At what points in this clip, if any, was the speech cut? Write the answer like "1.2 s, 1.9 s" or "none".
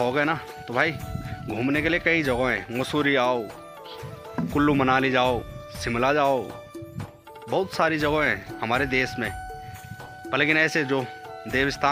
none